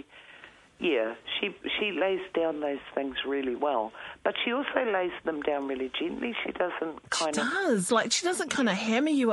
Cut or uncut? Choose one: uncut